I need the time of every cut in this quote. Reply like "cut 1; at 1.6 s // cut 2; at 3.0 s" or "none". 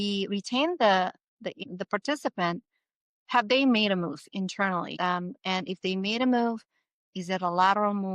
cut 1; at 1.6 s // cut 2; at 4.9 s